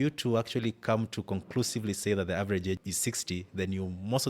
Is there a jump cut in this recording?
yes; 1 cut; at 2.8 s

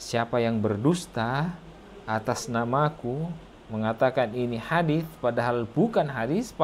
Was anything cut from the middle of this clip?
no; 0 cuts

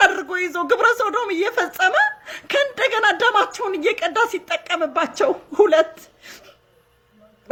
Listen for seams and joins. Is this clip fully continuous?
yes; 0 cuts

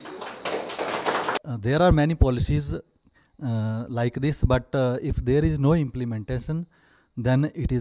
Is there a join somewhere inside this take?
yes; 1 cut; at 1.4 s

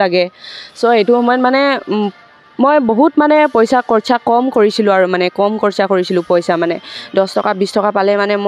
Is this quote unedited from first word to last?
yes; 0 cuts

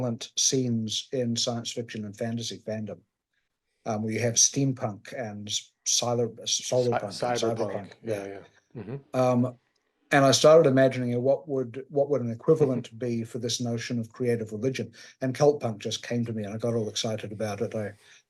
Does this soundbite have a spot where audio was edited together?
no; 0 cuts

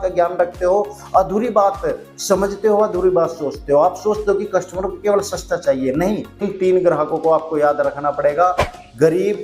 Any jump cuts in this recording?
yes; 1 cut; at 6.5 s

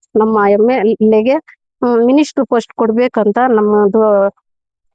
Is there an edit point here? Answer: no; 0 cuts

